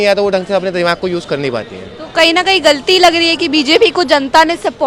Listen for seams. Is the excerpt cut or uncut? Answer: uncut